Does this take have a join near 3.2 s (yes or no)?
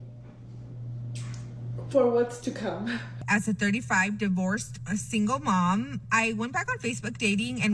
yes